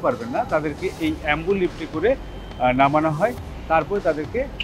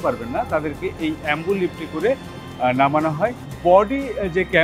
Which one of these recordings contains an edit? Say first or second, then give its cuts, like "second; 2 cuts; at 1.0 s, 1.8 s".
second; 1 cut; at 3.5 s